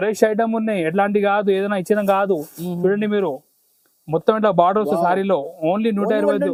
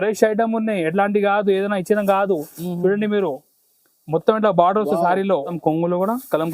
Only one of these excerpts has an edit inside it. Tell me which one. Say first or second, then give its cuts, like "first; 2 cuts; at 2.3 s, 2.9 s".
second; 1 cut; at 5.6 s